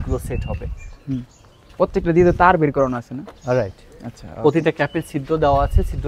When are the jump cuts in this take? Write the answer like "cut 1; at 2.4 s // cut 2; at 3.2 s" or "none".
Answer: none